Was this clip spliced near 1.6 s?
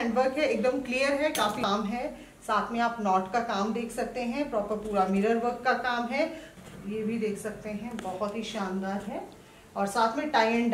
yes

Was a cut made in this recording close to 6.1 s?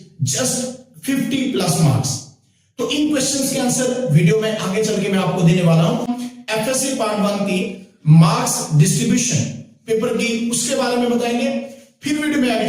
yes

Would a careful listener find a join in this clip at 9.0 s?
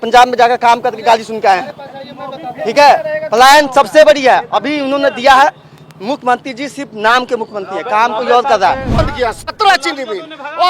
yes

